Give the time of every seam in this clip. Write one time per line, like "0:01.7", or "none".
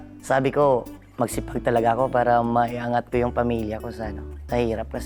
none